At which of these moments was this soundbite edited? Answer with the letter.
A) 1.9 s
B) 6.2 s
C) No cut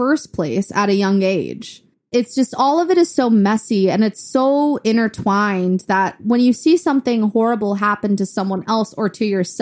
A